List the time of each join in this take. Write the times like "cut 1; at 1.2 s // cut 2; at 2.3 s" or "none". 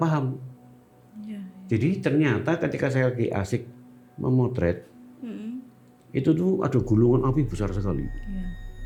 none